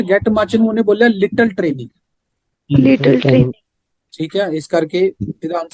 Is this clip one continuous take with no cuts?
yes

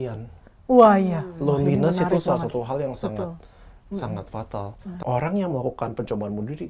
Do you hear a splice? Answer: yes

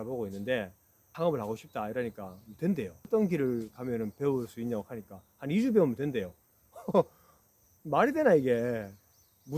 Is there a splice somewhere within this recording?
yes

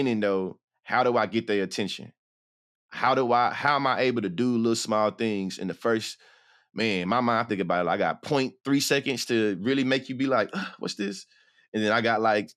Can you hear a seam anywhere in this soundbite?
no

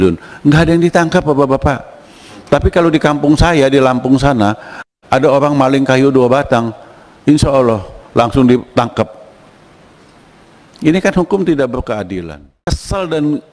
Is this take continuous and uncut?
no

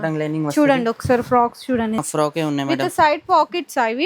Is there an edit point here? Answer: yes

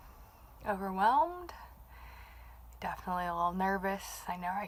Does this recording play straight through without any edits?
yes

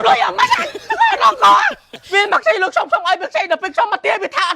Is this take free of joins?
no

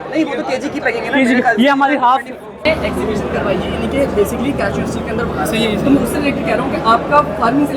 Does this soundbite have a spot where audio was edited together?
yes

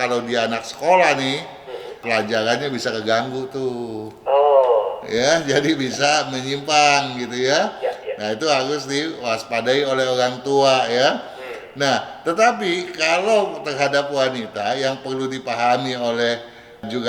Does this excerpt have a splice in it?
no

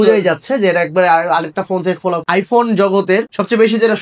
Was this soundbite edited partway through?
yes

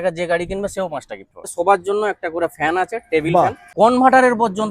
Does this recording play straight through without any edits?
no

